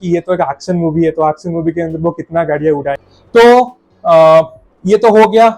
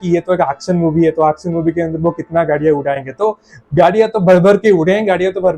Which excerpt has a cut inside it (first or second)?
first